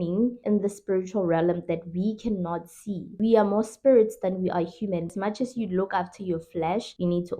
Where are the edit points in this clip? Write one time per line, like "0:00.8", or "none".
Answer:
0:03.2
0:05.1